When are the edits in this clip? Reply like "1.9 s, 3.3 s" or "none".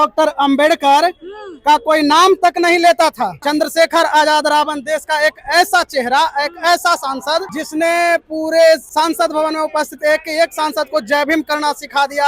3.4 s, 7.6 s, 8.9 s